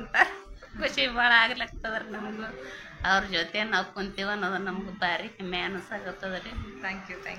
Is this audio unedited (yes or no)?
yes